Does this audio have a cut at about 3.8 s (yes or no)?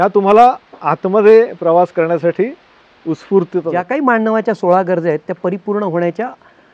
yes